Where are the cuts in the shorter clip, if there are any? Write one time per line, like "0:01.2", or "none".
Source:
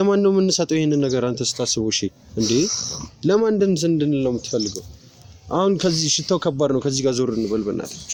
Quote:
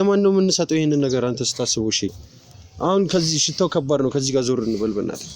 0:02.2